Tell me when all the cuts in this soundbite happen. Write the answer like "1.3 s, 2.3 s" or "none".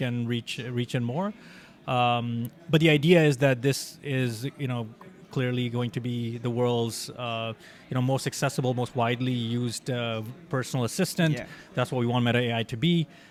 none